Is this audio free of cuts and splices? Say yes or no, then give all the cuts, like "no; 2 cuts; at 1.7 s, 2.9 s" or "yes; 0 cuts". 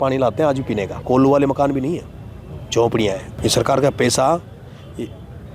no; 2 cuts; at 1.0 s, 3.3 s